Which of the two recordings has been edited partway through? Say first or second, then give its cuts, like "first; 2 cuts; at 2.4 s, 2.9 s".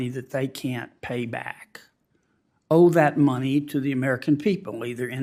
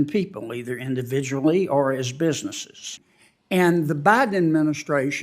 second; 1 cut; at 3.0 s